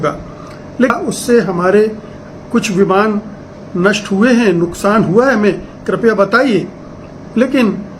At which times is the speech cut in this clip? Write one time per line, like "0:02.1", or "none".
0:00.9